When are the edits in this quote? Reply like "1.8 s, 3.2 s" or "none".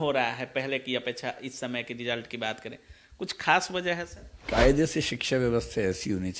4.2 s

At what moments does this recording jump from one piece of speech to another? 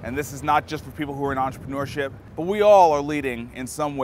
2.2 s

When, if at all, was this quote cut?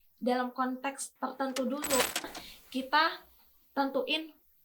2.2 s

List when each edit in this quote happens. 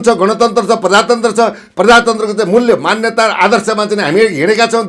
none

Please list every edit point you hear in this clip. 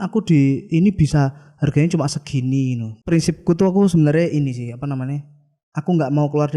3.0 s

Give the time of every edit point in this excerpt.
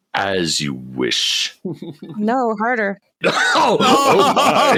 none

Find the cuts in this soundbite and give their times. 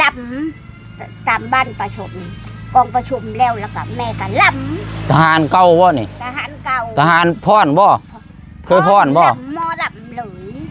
none

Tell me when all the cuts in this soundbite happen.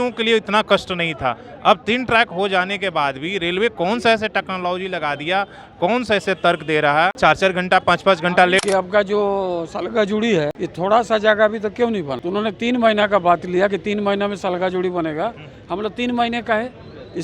7.1 s, 8.6 s, 10.6 s, 12.2 s

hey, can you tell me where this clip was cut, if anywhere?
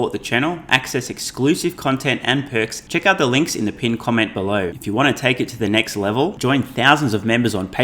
2.8 s, 4.8 s

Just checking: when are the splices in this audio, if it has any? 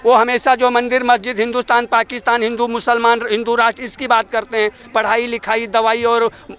none

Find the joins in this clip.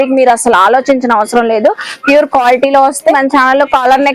3.2 s

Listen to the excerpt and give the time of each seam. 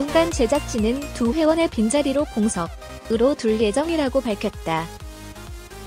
4.8 s

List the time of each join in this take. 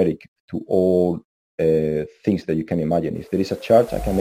none

